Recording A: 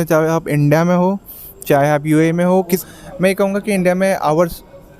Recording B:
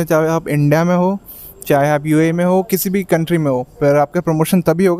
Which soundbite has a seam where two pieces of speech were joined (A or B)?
A